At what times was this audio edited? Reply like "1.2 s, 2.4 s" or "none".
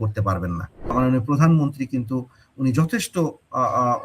0.9 s